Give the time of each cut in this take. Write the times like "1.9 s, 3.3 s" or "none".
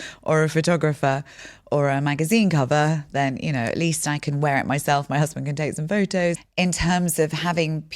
6.4 s